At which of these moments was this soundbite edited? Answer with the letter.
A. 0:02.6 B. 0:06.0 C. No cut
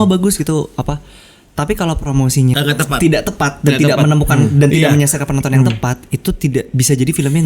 A